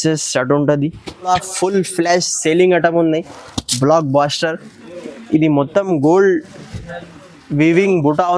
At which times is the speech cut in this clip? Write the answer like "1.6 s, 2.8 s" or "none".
1.3 s